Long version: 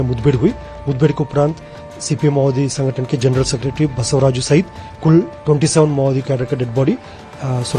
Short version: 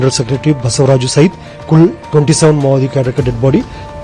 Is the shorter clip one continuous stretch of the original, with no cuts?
yes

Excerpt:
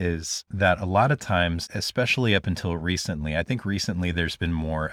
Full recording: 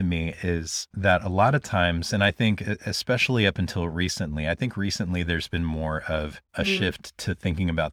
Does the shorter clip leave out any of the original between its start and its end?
yes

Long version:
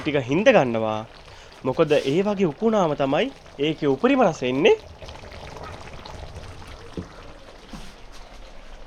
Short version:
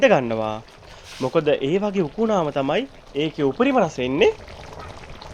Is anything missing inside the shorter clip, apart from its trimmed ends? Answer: yes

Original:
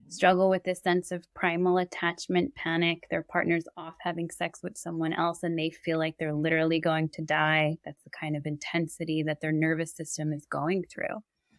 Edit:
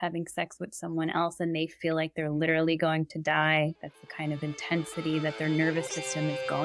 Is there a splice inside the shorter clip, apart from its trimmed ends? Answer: no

